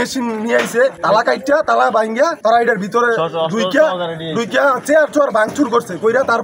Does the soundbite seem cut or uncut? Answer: cut